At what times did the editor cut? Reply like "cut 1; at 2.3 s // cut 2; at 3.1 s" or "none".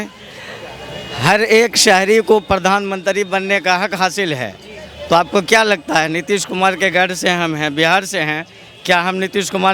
none